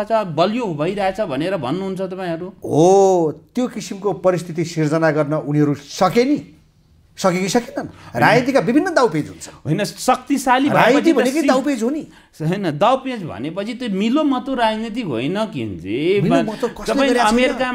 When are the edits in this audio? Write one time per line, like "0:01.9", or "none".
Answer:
none